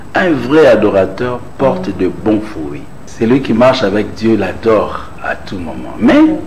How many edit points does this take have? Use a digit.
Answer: 1